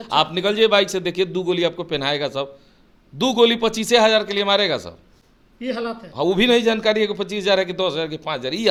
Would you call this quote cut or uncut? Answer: uncut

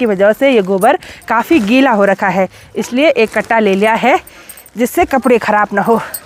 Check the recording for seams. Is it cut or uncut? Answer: uncut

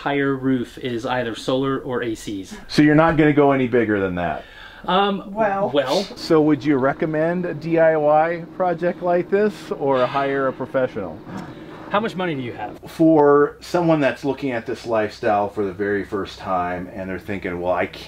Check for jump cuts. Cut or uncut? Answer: cut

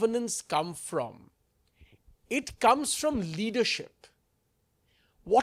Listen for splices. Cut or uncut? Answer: uncut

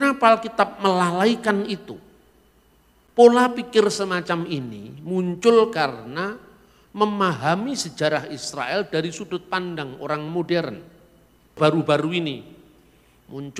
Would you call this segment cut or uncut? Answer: cut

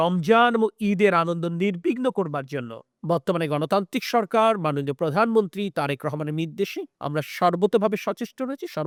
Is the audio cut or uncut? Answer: uncut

